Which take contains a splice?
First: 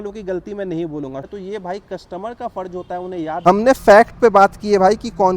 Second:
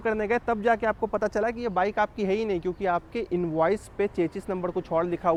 first; 2 cuts; at 1.3 s, 3.4 s

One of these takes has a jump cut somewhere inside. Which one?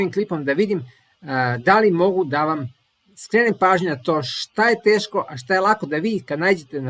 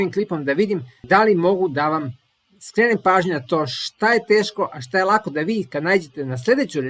second; 1 cut; at 1.0 s

